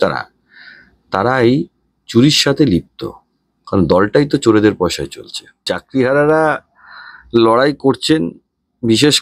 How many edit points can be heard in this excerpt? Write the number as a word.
one